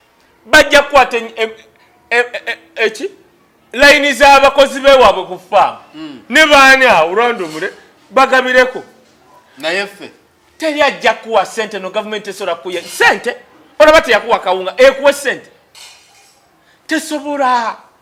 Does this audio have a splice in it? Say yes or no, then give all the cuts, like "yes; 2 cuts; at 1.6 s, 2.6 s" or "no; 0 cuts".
no; 0 cuts